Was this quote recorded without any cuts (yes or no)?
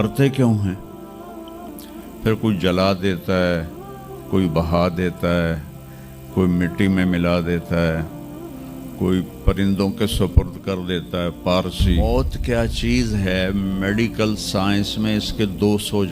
no